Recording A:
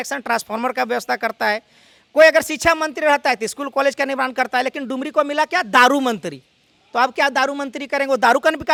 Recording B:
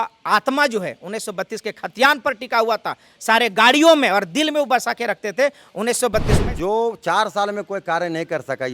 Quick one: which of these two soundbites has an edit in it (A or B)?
B